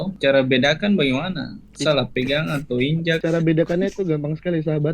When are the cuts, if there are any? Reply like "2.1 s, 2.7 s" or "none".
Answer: 3.2 s